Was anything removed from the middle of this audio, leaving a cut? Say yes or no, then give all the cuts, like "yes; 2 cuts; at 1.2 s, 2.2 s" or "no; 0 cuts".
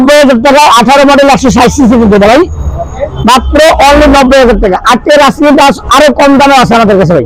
no; 0 cuts